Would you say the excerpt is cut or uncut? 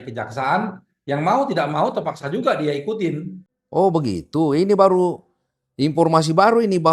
uncut